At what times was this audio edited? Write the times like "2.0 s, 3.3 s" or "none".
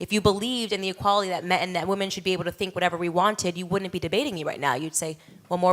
3.6 s